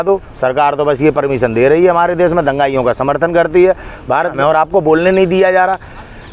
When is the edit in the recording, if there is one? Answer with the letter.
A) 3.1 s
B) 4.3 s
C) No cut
B